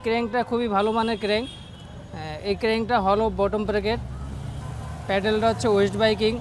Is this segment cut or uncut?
uncut